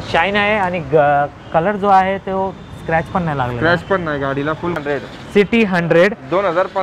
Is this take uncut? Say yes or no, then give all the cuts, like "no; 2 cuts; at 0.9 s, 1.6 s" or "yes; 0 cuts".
no; 1 cut; at 4.8 s